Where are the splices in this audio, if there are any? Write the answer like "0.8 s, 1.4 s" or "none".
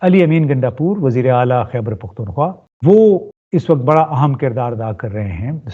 2.7 s, 3.3 s